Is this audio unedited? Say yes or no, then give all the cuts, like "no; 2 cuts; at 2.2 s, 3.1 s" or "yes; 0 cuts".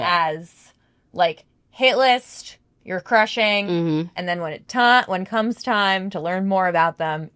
yes; 0 cuts